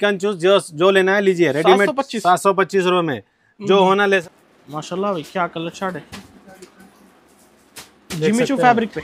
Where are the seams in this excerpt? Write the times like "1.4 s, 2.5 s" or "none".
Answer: 4.2 s